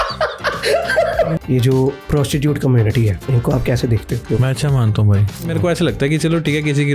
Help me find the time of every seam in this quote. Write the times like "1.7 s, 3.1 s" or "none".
1.4 s, 2.0 s, 3.2 s, 4.2 s, 5.5 s